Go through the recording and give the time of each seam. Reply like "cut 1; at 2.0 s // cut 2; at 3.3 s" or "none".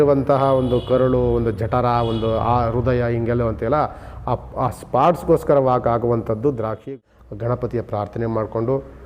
cut 1; at 6.9 s